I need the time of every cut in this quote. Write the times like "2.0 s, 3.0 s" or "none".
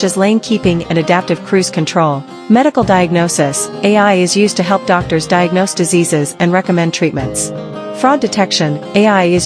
2.3 s